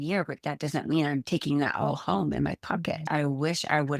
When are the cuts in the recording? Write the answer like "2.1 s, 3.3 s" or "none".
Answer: 3.0 s